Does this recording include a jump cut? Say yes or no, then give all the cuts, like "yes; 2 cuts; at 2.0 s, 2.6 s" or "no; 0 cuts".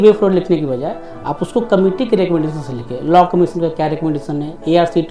no; 0 cuts